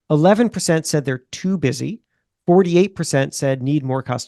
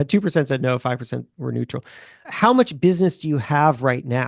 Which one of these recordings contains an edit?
second; 1 cut; at 2.3 s

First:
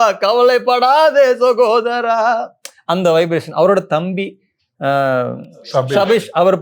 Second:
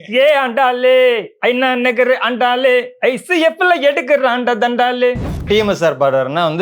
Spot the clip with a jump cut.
second; 1 cut; at 5.4 s

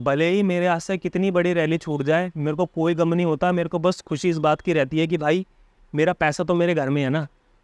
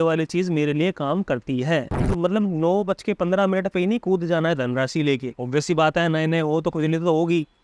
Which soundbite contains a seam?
second; 2 cuts; at 2.1 s, 5.3 s

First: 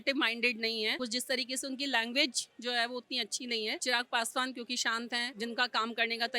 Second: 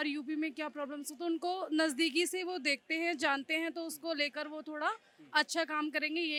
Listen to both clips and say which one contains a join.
first; 3 cuts; at 1.0 s, 3.8 s, 5.3 s

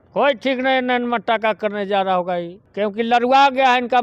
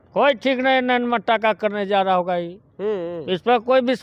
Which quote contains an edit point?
first; 1 cut; at 2.6 s

